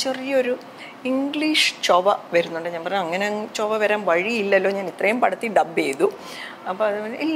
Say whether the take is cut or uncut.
uncut